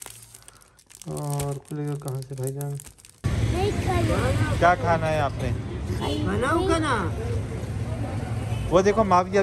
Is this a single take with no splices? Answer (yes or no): no